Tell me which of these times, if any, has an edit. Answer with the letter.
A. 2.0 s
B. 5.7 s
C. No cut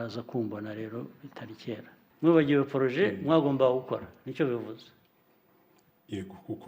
A